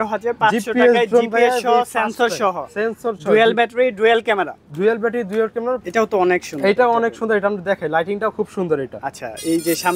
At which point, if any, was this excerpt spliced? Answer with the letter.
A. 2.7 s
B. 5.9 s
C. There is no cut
B